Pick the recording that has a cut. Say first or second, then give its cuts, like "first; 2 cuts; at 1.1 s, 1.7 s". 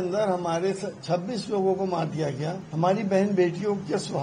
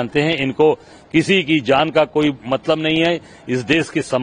first; 1 cut; at 2.6 s